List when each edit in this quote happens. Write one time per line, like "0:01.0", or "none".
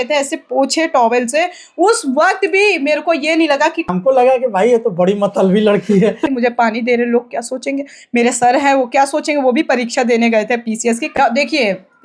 0:03.9
0:06.2
0:11.1